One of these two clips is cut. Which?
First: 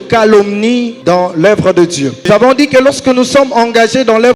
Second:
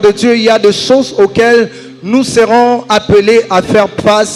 first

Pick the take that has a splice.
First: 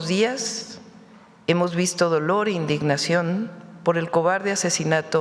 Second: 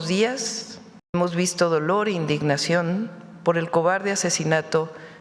second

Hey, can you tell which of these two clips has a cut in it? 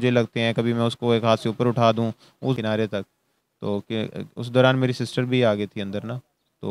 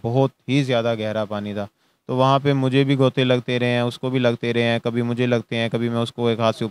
first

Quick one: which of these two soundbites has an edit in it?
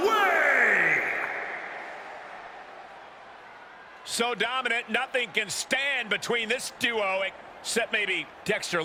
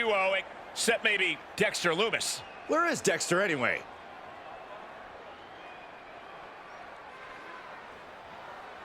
second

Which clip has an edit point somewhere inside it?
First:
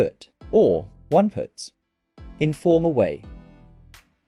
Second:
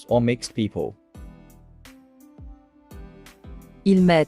second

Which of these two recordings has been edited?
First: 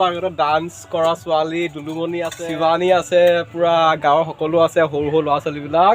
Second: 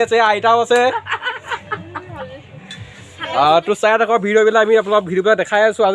first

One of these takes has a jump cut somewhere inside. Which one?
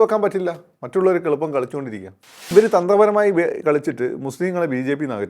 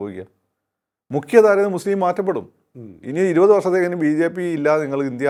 first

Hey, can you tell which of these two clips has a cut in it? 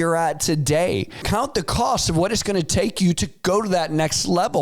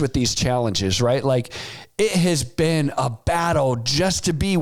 first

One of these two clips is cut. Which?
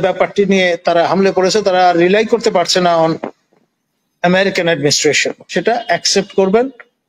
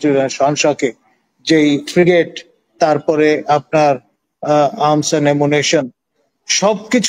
first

